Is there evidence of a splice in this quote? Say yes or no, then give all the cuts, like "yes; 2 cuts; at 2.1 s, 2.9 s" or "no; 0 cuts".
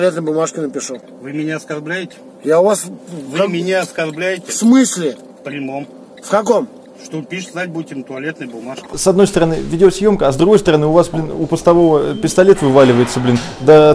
yes; 3 cuts; at 1.1 s, 6.9 s, 8.8 s